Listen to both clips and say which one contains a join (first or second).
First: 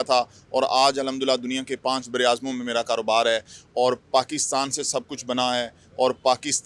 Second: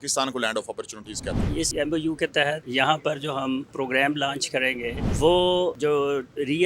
second